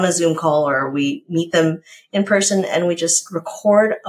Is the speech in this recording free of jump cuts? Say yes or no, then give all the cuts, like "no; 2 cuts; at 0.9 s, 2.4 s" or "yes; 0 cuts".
yes; 0 cuts